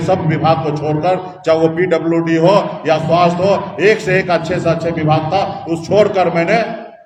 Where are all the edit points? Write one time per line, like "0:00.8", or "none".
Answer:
none